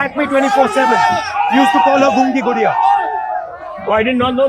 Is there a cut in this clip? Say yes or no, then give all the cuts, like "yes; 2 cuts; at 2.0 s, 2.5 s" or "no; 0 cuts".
no; 0 cuts